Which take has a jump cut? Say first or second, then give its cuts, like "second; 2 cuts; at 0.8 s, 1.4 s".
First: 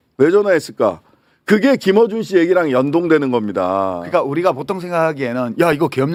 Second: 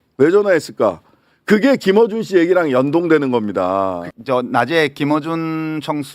second; 1 cut; at 4.0 s